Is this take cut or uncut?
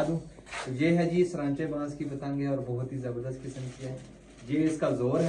uncut